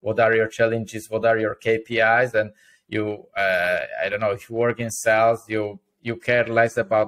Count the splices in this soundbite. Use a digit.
0